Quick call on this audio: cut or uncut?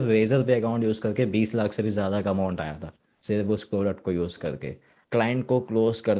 cut